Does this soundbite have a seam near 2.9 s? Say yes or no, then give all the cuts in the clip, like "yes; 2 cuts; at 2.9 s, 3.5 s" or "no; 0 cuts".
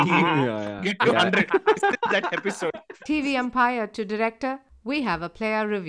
yes; 1 cut; at 2.9 s